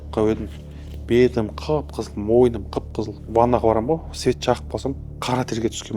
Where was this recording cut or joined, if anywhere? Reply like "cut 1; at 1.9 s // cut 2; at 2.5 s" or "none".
cut 1; at 3.2 s // cut 2; at 5.1 s